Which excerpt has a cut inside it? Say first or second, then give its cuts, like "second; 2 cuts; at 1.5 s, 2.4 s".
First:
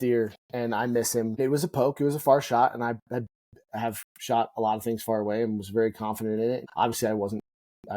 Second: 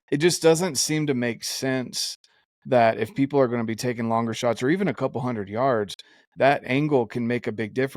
first; 2 cuts; at 1.4 s, 6.6 s